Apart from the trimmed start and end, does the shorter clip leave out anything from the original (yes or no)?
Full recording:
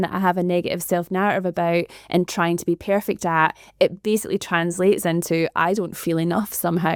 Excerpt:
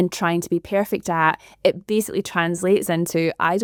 no